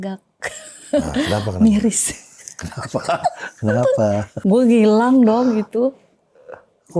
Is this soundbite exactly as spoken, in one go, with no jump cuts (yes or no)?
no